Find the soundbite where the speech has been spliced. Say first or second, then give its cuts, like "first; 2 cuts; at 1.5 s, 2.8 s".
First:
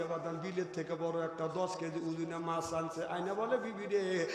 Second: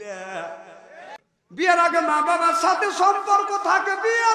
second; 1 cut; at 1.1 s